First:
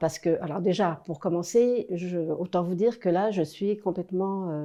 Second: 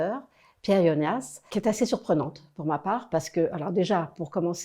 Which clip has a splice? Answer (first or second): second